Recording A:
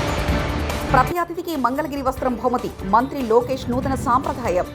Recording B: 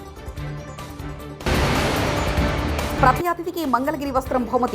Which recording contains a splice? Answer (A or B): B